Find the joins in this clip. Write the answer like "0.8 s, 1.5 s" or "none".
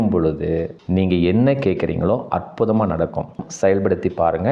3.4 s